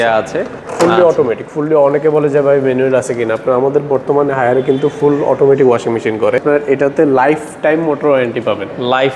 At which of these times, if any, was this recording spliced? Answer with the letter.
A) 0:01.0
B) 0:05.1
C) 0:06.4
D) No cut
C